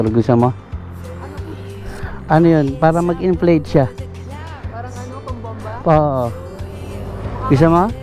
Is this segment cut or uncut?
uncut